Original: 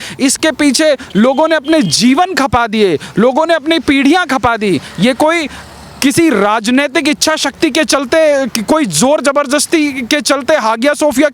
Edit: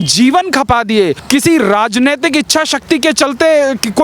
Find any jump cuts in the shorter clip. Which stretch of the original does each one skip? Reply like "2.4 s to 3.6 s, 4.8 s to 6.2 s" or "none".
3.0 s to 5.9 s